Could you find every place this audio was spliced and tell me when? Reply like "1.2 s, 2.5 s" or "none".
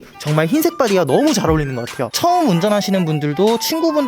2.1 s